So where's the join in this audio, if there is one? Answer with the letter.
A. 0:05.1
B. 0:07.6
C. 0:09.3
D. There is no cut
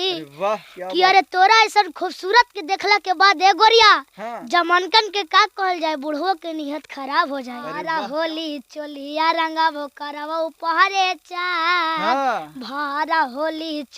B